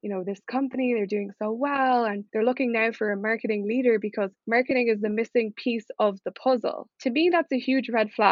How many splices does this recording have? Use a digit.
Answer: 0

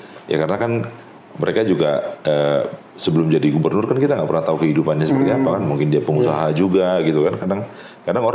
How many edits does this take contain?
0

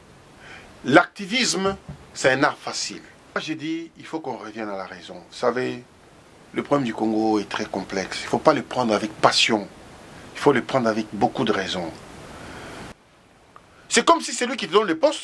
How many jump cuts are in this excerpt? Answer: 2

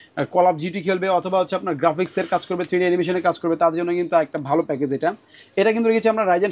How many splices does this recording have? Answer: 0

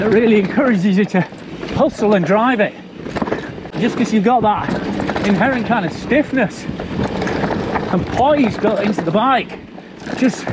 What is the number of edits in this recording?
1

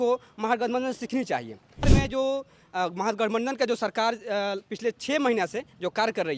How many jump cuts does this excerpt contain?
1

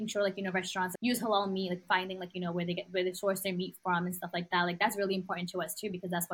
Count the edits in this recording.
2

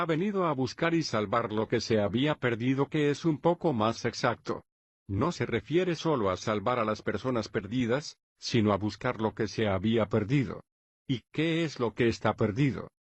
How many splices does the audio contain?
1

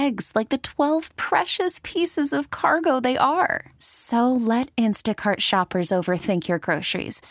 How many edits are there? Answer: 0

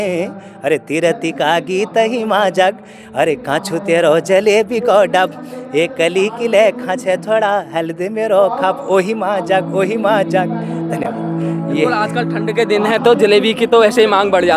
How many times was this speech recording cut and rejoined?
0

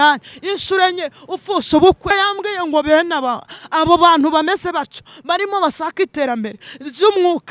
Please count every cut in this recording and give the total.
1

